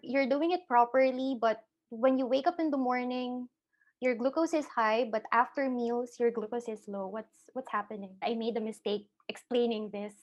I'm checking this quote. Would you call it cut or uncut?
cut